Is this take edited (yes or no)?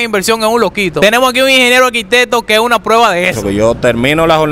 yes